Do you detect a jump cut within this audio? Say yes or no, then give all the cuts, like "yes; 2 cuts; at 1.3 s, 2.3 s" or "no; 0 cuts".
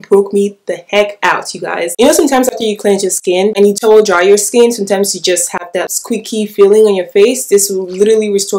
yes; 2 cuts; at 1.9 s, 5.9 s